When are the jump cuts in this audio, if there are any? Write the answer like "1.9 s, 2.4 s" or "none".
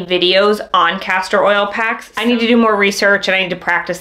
2.1 s